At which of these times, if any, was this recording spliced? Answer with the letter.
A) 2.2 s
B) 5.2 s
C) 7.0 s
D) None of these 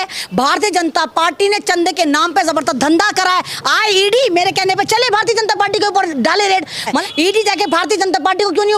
C